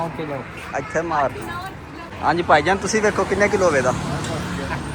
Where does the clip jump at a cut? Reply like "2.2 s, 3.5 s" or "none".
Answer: 2.0 s